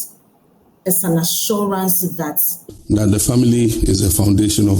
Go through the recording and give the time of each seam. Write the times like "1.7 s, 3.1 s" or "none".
2.5 s